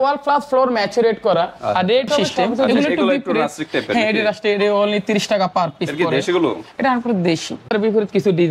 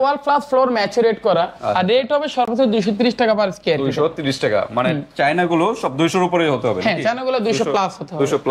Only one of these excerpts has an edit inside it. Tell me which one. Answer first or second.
first